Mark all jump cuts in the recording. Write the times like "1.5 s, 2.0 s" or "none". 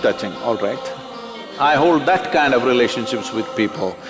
1.5 s